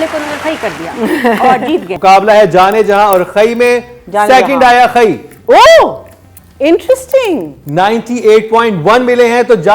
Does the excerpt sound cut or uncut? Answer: cut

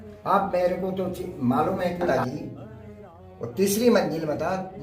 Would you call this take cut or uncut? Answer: cut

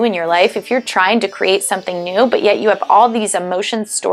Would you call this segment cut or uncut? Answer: uncut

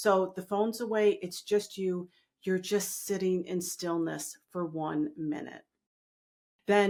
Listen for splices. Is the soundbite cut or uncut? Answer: uncut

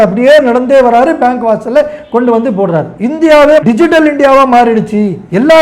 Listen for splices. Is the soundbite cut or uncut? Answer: cut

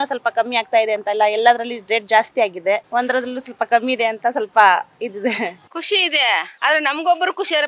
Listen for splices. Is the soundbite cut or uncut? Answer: uncut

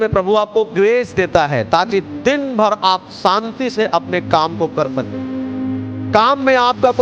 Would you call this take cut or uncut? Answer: uncut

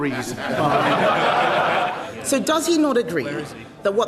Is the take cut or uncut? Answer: cut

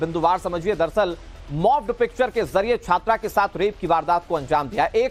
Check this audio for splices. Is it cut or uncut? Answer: uncut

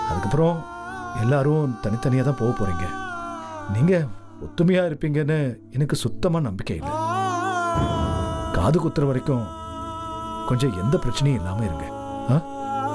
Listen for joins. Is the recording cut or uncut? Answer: uncut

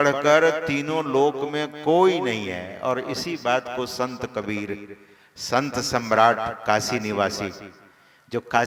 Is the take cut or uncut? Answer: uncut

